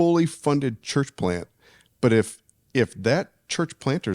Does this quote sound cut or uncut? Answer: uncut